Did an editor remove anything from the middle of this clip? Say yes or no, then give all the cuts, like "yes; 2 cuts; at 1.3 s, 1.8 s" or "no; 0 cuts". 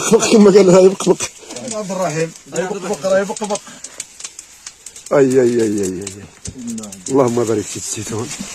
no; 0 cuts